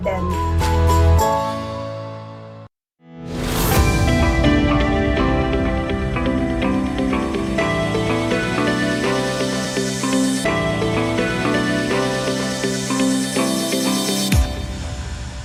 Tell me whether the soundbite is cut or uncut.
uncut